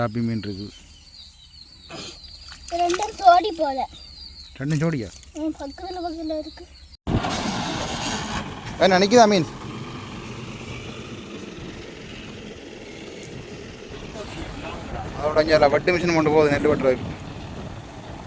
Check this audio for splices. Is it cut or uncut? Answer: cut